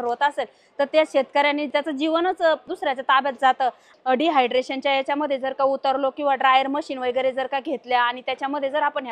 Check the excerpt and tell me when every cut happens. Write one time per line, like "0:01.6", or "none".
0:01.7
0:02.7
0:03.9